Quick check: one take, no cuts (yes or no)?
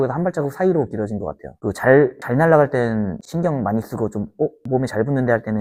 yes